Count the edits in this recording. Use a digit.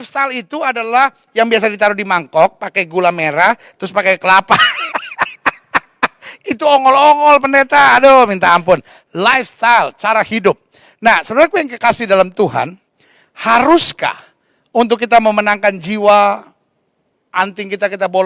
1